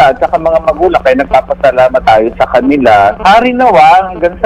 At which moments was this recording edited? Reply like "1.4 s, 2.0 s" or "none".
2.0 s, 3.2 s

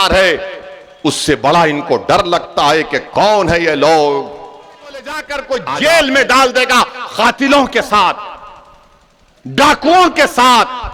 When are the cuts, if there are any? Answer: 5.1 s

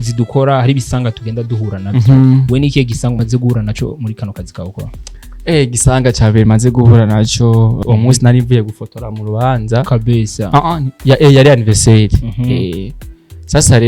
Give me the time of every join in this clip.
3.2 s, 7.8 s

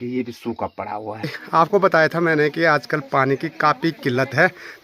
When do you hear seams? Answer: 1.3 s

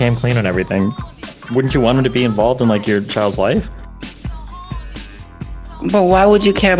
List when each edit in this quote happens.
none

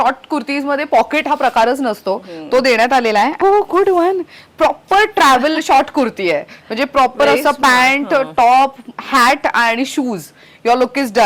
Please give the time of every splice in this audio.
3.4 s

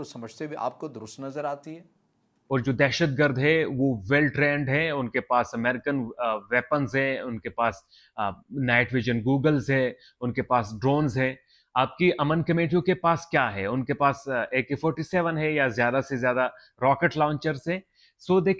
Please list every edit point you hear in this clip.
2.3 s

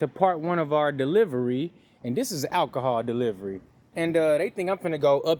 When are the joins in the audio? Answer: none

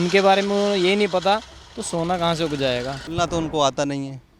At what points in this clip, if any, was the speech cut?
3.1 s

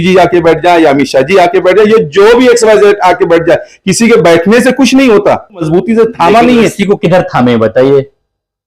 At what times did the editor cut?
5.7 s

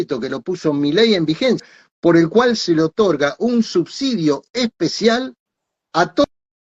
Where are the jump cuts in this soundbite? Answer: 1.7 s

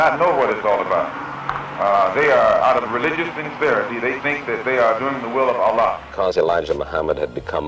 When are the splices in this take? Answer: 6.1 s

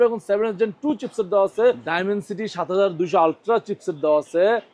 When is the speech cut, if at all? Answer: 1.9 s

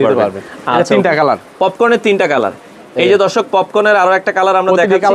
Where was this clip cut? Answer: none

